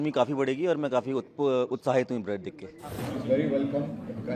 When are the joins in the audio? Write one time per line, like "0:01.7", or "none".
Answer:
0:02.8